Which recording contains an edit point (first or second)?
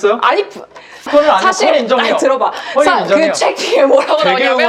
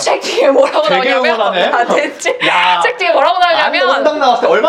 first